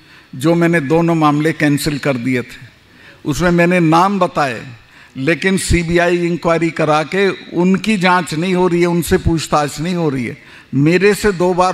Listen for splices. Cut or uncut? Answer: uncut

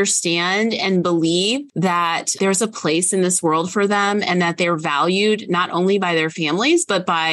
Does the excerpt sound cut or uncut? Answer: cut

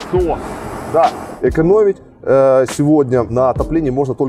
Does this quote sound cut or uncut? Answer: cut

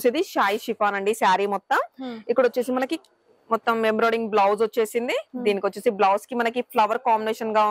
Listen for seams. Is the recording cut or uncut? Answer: uncut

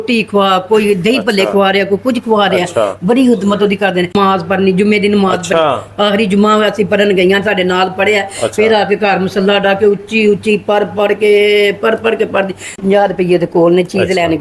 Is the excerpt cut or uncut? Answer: cut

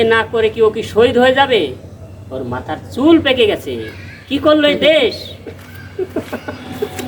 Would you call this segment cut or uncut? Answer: uncut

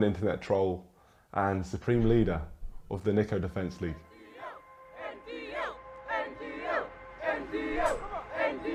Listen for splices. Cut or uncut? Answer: uncut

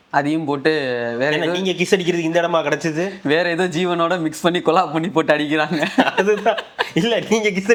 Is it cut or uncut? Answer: uncut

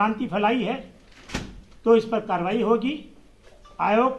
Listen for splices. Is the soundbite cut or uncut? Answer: uncut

